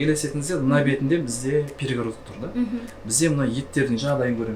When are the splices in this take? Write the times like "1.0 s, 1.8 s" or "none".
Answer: none